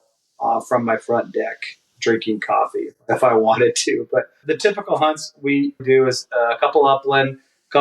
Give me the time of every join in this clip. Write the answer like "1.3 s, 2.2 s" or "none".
3.0 s, 4.4 s, 5.8 s